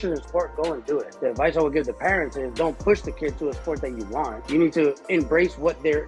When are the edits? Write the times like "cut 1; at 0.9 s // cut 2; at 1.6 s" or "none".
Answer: cut 1; at 1.1 s // cut 2; at 4.4 s // cut 3; at 5.0 s